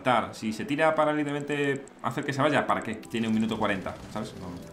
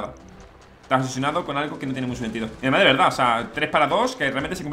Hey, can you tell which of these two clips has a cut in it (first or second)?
first